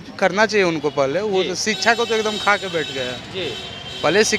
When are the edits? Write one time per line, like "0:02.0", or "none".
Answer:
none